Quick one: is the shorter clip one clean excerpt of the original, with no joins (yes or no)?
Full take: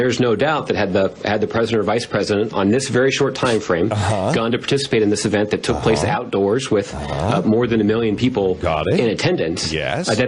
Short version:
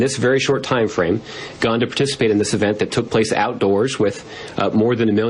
yes